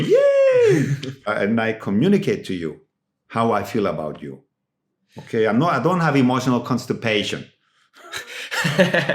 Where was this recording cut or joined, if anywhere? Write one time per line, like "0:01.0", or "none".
0:01.3